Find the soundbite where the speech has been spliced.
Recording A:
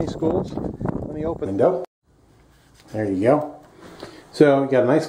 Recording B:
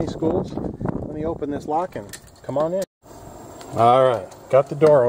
B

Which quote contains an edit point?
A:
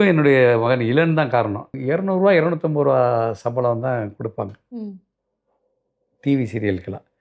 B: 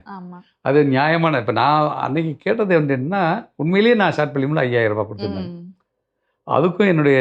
A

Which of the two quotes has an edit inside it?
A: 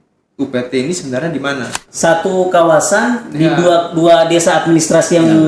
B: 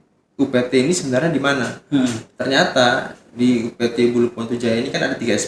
A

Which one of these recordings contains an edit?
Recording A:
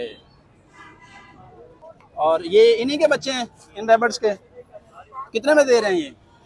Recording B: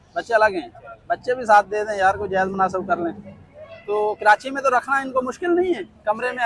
A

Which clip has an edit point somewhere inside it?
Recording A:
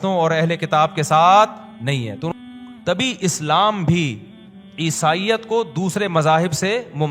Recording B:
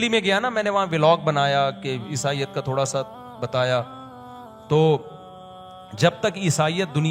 A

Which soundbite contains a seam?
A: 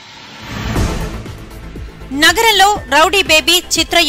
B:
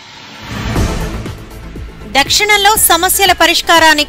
B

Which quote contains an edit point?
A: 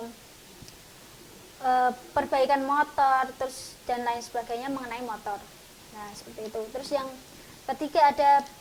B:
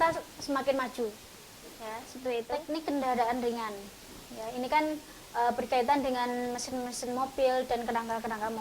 B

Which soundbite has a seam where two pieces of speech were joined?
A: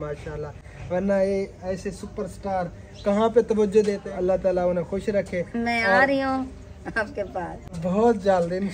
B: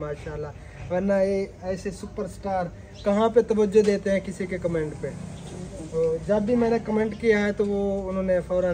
A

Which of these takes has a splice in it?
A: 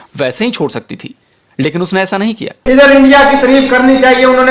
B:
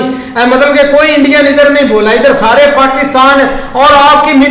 A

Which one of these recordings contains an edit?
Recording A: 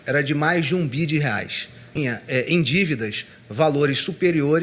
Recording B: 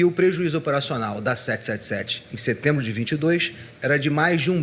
A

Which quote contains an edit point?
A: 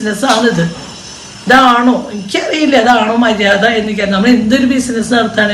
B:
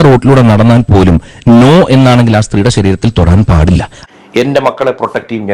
B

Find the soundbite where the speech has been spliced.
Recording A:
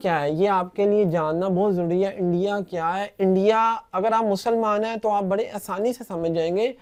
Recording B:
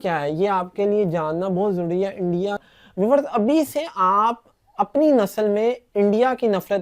B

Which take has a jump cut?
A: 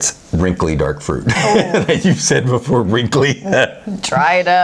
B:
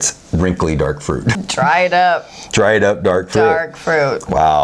B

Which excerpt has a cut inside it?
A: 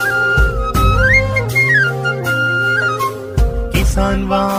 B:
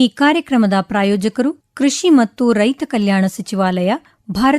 B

